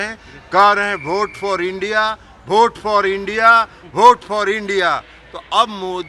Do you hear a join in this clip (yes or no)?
no